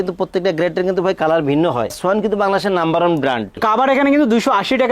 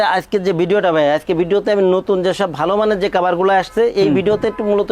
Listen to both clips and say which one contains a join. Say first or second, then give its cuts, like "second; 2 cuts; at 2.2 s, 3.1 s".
first; 1 cut; at 3.6 s